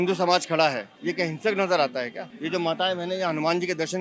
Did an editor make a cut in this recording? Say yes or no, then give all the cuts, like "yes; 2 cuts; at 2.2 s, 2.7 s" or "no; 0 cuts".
yes; 1 cut; at 0.9 s